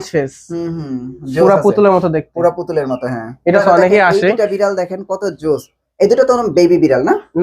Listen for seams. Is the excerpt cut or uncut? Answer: cut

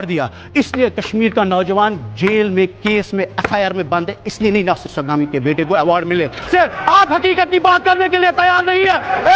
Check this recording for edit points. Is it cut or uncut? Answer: cut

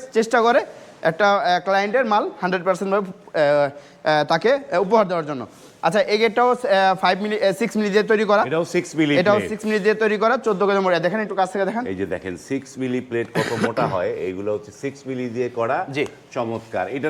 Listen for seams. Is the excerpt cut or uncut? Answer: uncut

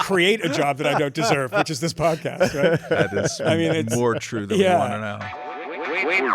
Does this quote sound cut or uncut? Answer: cut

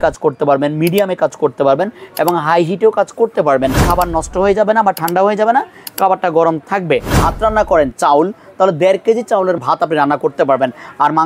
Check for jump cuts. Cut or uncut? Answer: cut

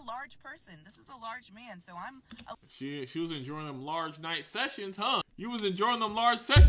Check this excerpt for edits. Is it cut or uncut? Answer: cut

